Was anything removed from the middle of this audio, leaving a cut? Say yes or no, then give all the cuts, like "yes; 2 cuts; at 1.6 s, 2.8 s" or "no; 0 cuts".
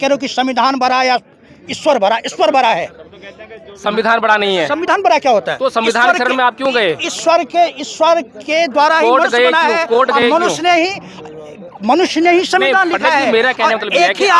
no; 0 cuts